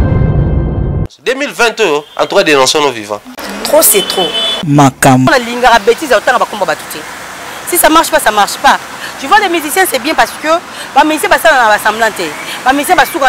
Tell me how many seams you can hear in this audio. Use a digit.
1